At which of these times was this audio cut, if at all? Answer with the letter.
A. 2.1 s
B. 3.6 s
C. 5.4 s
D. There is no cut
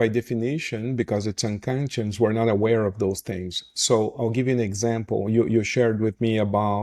D